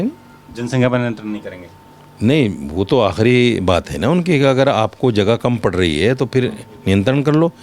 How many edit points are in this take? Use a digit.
0